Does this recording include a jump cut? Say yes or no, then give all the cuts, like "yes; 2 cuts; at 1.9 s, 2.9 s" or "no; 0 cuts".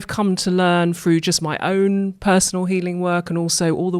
no; 0 cuts